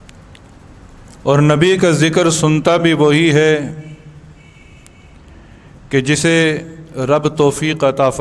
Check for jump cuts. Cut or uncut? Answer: uncut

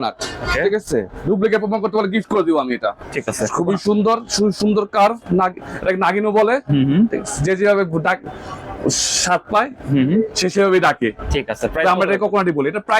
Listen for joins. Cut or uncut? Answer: cut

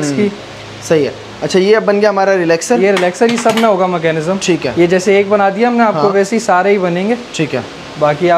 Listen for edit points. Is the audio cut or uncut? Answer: uncut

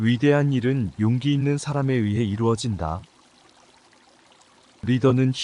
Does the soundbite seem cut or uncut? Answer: uncut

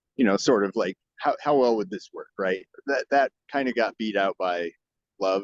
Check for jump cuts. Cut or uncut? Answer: cut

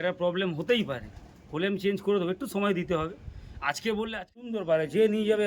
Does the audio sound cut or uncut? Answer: cut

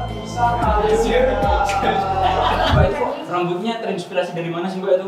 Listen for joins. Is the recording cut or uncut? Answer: uncut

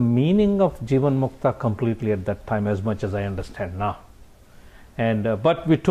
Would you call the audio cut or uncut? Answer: uncut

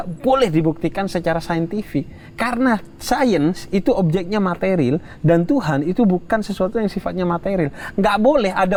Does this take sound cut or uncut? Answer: uncut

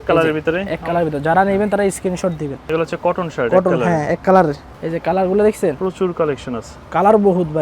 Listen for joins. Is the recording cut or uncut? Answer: cut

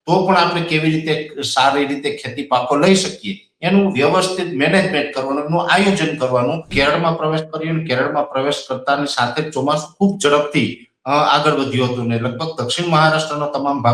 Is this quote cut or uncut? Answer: cut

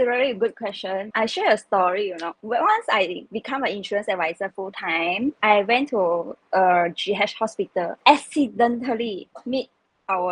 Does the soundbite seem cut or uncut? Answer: cut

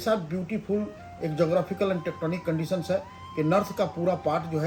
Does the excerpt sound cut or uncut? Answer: uncut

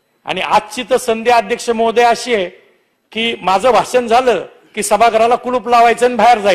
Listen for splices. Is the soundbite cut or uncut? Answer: uncut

